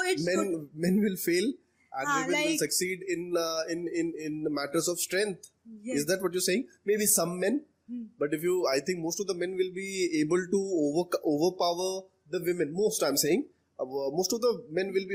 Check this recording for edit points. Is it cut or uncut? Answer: uncut